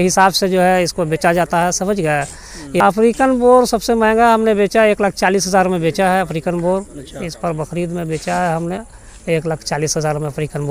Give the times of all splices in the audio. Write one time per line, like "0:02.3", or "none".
0:02.8